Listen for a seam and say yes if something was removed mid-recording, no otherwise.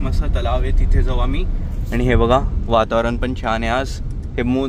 no